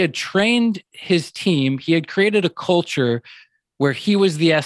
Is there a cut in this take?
no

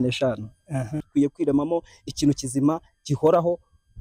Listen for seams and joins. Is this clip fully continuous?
no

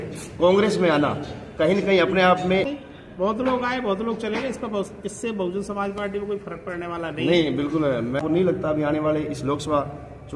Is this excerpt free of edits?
yes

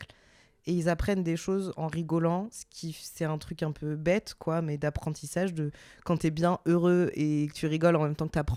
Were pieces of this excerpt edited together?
no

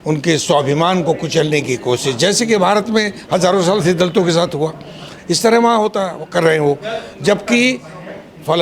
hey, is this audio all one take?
yes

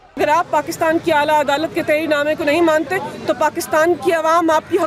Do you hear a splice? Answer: no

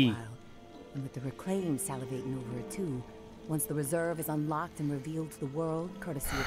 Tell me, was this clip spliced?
no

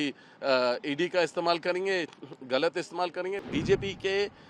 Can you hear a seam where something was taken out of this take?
yes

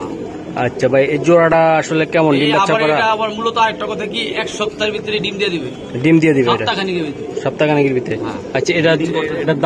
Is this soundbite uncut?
yes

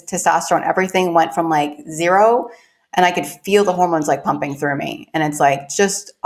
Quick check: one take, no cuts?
yes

